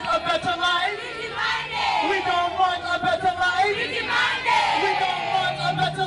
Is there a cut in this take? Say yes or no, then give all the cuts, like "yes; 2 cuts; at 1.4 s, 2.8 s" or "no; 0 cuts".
no; 0 cuts